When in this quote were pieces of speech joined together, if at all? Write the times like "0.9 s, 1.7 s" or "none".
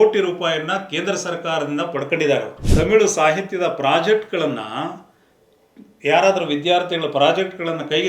2.6 s